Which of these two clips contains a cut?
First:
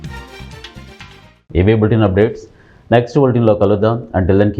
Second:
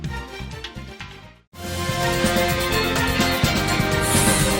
second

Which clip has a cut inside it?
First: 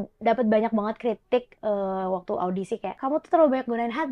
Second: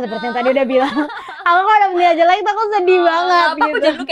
first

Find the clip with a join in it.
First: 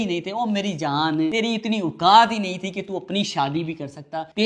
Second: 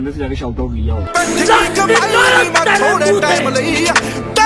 second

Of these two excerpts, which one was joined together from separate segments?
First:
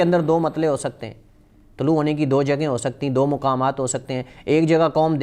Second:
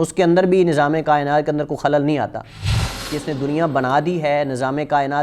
second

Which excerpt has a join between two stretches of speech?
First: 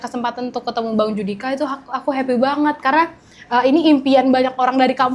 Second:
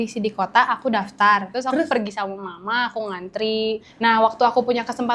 second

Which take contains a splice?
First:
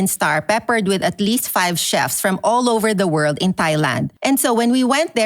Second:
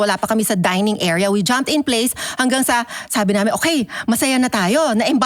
first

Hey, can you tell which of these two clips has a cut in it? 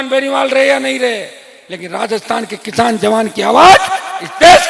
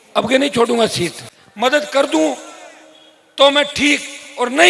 second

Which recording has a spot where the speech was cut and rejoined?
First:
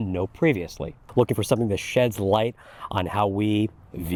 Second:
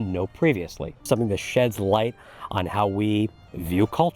second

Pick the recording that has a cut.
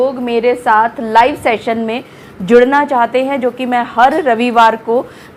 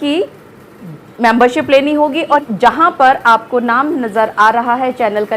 second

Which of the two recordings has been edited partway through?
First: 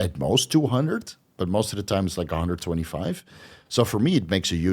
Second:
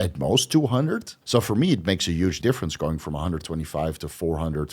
second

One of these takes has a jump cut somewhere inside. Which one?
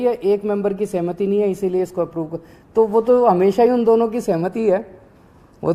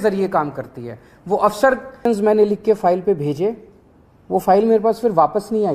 second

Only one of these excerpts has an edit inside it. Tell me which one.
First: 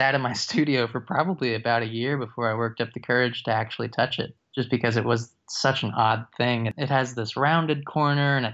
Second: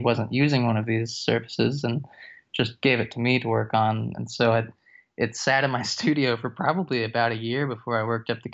first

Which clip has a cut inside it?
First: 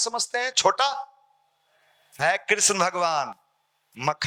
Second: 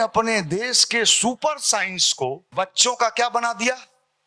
second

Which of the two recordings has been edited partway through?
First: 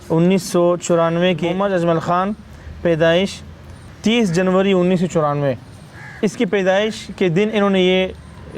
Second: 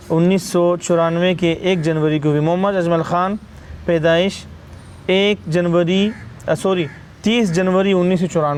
first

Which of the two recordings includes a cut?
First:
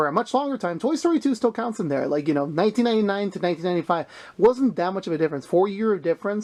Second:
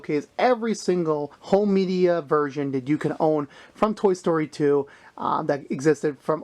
second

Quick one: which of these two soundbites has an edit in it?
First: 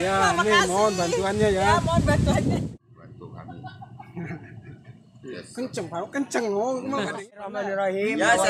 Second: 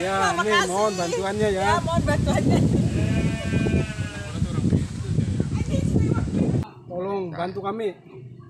first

